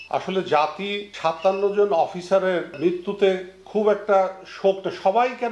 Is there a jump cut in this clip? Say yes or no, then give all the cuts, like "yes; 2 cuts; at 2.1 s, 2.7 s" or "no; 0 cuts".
yes; 2 cuts; at 1.0 s, 2.8 s